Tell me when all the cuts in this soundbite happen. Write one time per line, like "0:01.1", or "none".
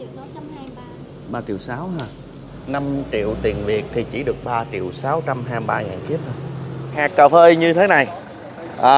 0:07.0